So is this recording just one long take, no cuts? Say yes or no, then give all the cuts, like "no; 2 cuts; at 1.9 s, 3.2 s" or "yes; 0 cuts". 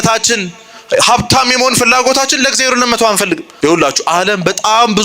no; 1 cut; at 3.5 s